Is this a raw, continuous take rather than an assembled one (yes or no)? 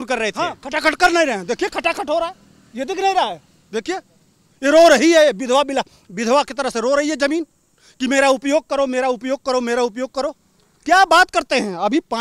yes